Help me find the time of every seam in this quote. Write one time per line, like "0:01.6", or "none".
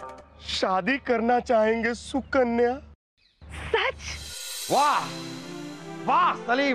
0:04.1